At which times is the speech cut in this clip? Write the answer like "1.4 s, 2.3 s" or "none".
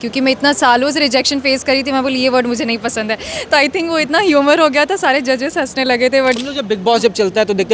6.4 s